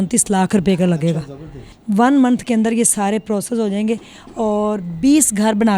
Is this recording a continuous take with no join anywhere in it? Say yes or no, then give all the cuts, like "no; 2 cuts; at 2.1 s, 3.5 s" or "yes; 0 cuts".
no; 1 cut; at 1.7 s